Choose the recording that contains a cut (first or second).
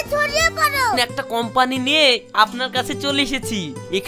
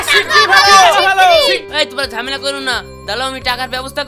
first